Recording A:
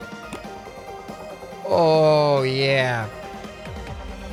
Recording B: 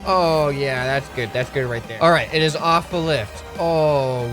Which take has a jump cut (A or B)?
B